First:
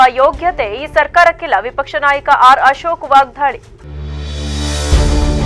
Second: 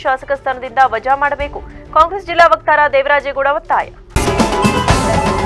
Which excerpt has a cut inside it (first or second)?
second